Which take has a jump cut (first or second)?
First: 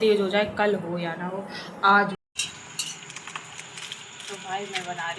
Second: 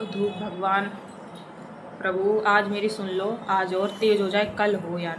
first